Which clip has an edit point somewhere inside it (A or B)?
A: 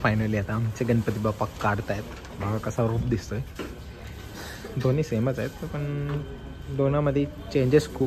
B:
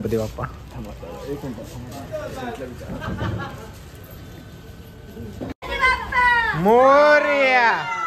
B